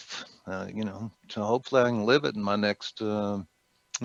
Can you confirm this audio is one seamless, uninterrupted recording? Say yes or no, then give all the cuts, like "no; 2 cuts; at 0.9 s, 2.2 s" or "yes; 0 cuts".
yes; 0 cuts